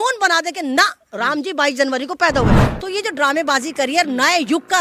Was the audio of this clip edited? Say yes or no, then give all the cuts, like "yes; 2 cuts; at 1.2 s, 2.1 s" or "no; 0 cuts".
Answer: yes; 1 cut; at 2.6 s